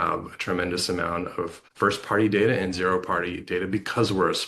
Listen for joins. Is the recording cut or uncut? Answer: cut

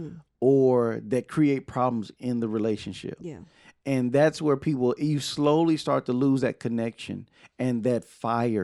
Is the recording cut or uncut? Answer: uncut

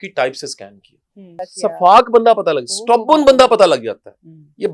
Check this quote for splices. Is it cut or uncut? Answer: cut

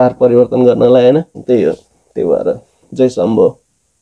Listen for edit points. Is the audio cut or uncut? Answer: uncut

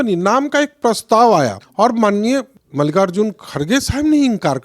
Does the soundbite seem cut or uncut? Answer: cut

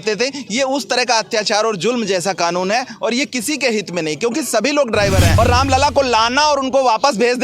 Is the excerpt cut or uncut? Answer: cut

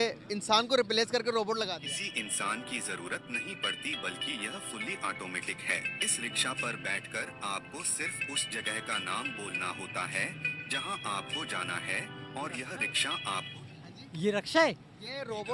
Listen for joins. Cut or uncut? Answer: uncut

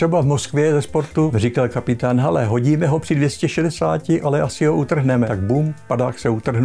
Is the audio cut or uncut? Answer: cut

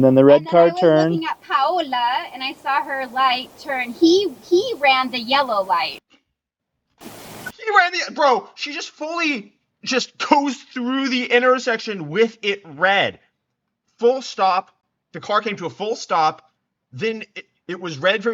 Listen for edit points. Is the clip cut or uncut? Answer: uncut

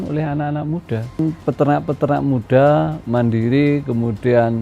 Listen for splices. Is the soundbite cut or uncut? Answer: cut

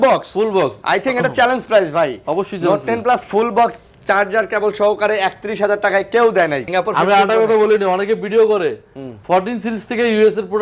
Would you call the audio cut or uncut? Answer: cut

